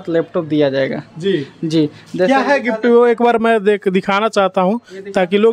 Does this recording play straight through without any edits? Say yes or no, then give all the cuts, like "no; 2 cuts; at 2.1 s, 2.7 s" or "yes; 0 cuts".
yes; 0 cuts